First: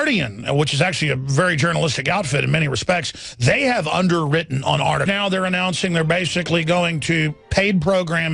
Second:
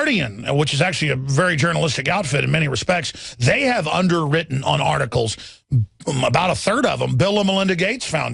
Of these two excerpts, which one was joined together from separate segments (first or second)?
second